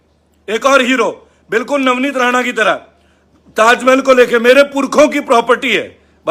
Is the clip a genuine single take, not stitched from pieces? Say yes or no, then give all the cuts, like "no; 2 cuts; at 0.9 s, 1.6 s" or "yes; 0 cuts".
yes; 0 cuts